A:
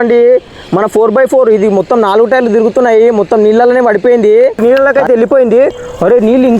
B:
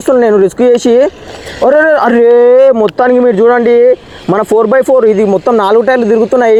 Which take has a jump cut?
A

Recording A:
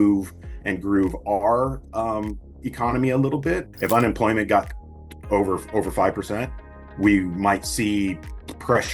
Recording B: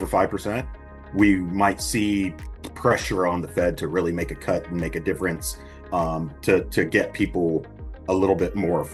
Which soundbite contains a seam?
A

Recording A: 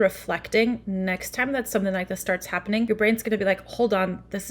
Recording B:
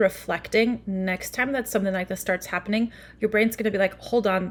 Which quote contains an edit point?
A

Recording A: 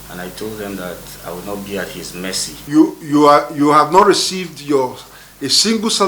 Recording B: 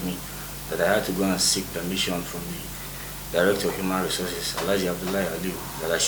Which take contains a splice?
A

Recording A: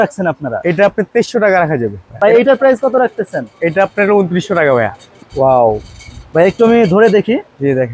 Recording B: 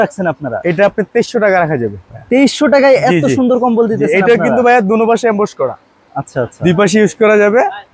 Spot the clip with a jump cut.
A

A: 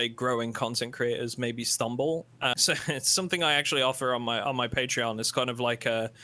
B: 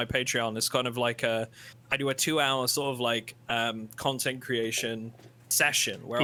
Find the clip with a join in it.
A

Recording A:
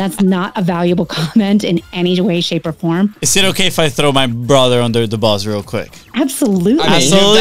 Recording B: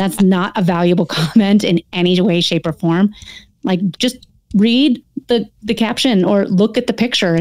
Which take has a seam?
A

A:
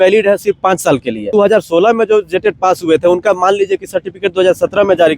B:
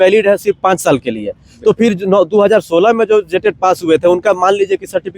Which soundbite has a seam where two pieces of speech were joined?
A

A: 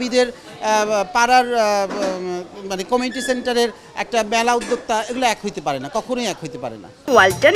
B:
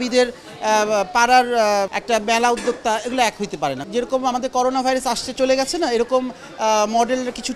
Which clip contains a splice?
B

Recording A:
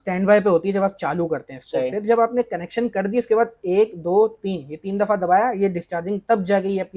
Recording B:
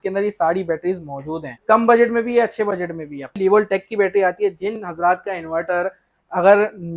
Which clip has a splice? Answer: B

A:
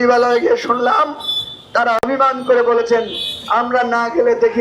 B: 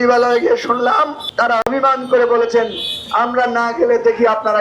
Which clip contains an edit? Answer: B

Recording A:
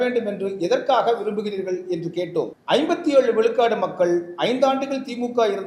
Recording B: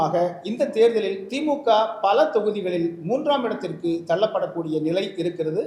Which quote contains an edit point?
A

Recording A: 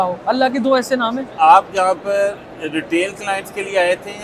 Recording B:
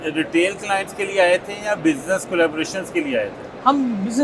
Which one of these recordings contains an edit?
A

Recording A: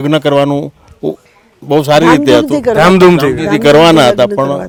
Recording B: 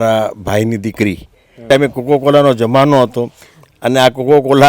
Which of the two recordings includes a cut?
B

